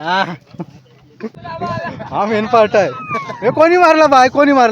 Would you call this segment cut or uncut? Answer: cut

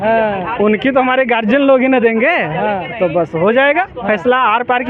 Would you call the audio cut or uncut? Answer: uncut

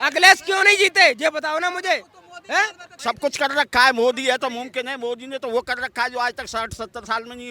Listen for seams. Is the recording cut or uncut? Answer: cut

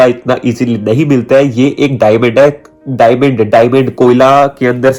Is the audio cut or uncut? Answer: uncut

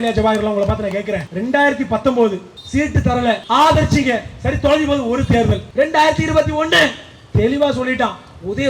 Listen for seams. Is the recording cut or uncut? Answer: cut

